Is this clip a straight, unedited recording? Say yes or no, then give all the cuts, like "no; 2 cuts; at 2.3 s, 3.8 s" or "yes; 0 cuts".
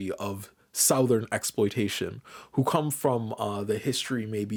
yes; 0 cuts